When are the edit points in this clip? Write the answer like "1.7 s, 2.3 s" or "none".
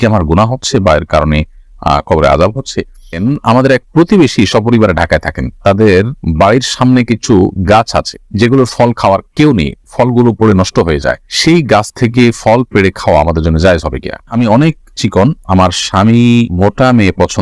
3.2 s, 14.3 s